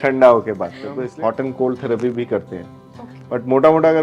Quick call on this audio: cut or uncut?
cut